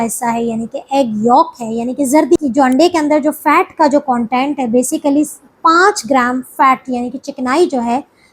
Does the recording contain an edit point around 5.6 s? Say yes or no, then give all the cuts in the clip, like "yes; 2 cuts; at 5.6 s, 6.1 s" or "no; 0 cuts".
no; 1 cut; at 2.4 s